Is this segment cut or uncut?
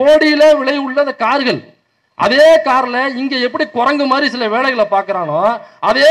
uncut